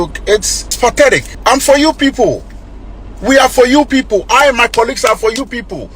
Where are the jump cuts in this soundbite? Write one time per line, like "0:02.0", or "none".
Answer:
0:01.0